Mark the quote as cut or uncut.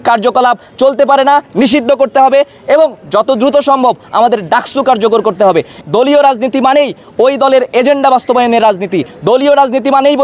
cut